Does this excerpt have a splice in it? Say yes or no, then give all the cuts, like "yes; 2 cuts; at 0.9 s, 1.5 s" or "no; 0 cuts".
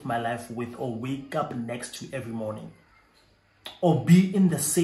no; 0 cuts